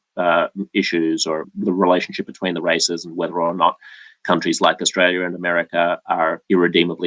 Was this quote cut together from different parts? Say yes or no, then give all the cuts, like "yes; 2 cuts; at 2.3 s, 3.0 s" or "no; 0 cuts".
yes; 1 cut; at 1.4 s